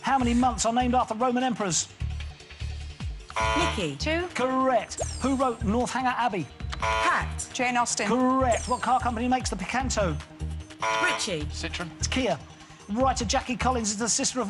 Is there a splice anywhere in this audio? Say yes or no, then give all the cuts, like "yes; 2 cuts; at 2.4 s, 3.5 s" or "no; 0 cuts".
yes; 1 cut; at 8.5 s